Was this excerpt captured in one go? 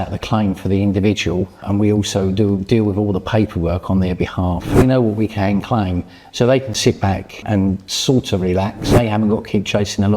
no; 4 cuts; at 1.6 s, 4.8 s, 7.5 s, 8.9 s

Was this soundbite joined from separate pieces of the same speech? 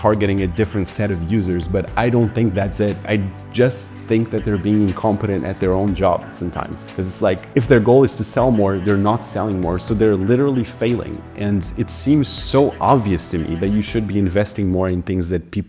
no; 0 cuts

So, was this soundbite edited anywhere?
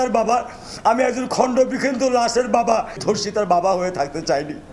no; 0 cuts

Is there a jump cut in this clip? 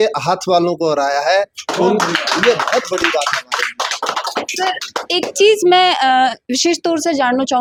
no; 0 cuts

